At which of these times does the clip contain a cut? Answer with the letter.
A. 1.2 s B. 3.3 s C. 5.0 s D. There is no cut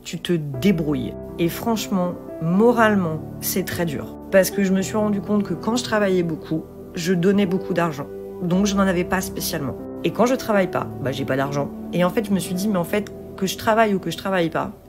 D